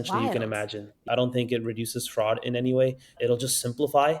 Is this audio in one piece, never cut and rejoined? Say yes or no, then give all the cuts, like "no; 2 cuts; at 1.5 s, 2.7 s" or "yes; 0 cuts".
no; 1 cut; at 0.9 s